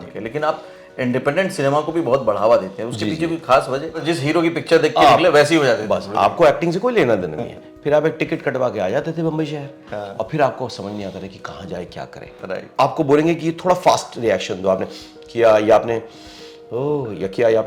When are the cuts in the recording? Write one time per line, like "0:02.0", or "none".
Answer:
0:04.0
0:12.7